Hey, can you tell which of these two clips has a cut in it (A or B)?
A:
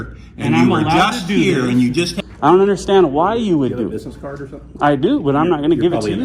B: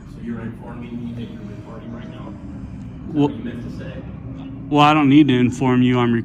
A